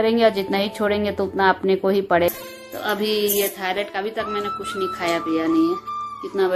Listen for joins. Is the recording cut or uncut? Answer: cut